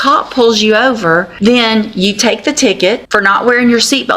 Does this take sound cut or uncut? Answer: cut